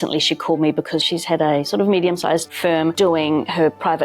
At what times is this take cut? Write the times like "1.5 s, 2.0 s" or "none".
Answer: 1.0 s, 2.5 s

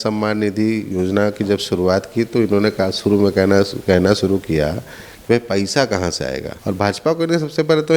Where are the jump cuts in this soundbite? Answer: 6.5 s

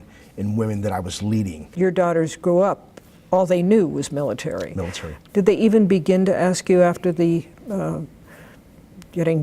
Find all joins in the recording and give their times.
1.7 s, 5.2 s

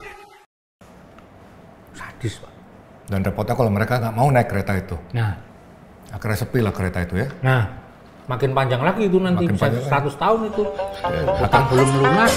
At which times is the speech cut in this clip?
5.2 s, 7.8 s

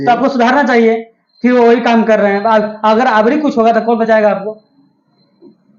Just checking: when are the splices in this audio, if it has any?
none

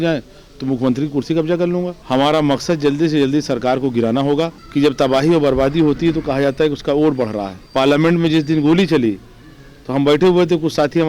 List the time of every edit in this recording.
2.0 s, 4.6 s, 7.6 s

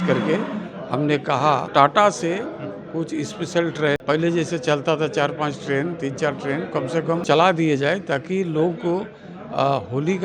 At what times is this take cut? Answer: 1.7 s, 4.0 s, 7.2 s

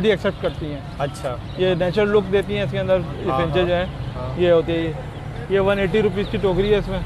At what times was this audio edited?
none

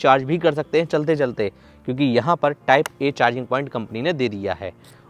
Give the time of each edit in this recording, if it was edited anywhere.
none

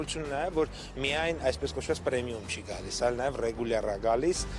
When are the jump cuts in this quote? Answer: none

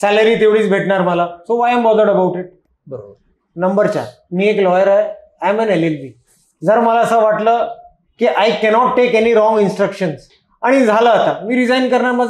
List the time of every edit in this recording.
none

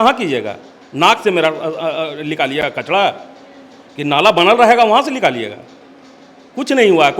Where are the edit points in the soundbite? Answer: none

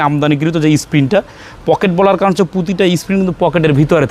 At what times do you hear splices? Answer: none

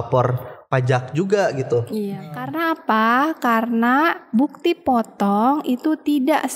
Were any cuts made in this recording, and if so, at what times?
2.3 s

